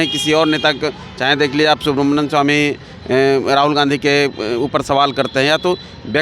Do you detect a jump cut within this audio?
no; 0 cuts

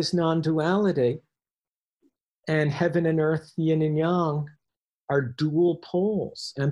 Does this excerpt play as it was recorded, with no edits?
yes; 0 cuts

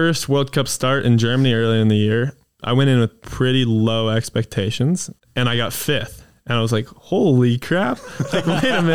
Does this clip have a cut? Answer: yes; 2 cuts; at 2.6 s, 5.2 s

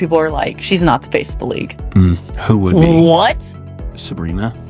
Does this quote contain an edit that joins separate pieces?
yes; 1 cut; at 1.7 s

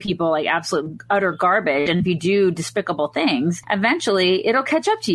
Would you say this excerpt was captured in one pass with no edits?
yes; 0 cuts

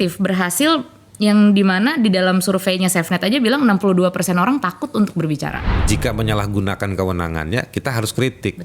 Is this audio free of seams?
no; 1 cut; at 5.6 s

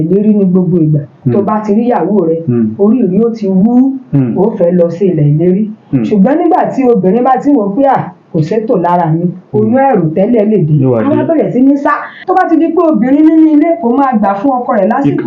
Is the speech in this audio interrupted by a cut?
yes; 2 cuts; at 1.2 s, 12.1 s

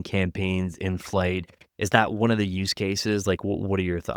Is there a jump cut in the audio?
no; 0 cuts

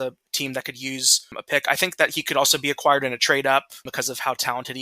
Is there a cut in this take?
yes; 1 cut; at 3.9 s

